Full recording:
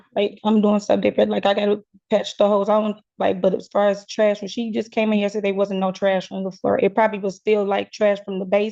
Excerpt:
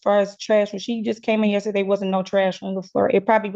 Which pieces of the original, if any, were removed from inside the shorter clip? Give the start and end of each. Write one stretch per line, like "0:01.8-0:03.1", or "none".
none